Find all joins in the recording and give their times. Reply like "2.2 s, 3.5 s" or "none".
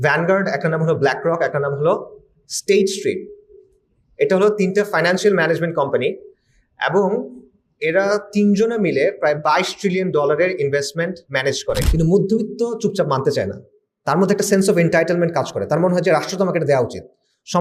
11.9 s